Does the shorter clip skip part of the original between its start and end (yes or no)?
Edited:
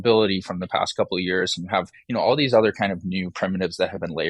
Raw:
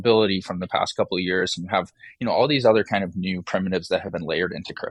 yes